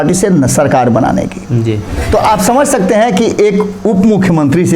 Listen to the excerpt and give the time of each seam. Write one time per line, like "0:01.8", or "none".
0:01.9